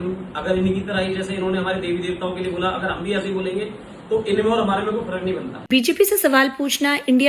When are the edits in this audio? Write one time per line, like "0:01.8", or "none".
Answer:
0:05.5